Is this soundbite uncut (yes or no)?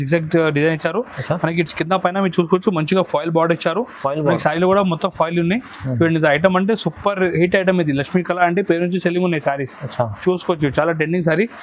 yes